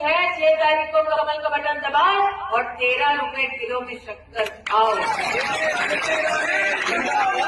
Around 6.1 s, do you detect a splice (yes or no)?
no